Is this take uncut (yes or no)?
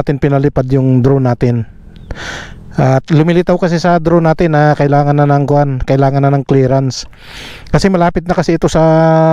yes